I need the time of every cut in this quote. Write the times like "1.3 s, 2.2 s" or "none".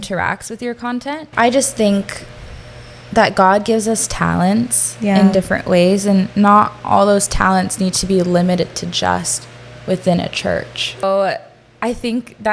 1.2 s, 11.0 s